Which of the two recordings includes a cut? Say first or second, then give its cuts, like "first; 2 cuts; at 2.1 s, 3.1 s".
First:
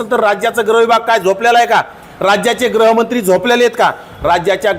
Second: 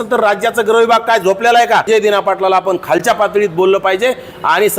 second; 1 cut; at 1.8 s